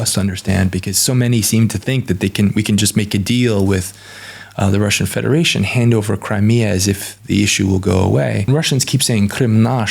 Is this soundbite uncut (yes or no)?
no